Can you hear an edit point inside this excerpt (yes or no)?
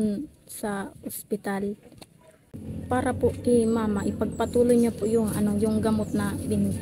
yes